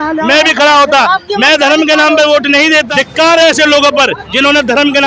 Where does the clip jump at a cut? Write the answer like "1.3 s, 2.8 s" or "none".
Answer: 2.9 s